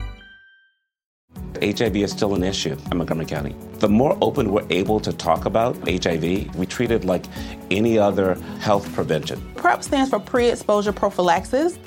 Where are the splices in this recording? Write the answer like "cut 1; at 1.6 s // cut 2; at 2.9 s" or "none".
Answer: cut 1; at 1.2 s